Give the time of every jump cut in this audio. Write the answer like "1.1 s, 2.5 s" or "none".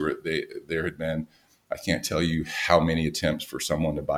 none